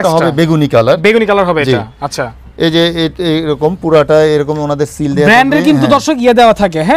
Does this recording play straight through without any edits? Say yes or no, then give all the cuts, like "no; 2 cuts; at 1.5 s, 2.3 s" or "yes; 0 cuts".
yes; 0 cuts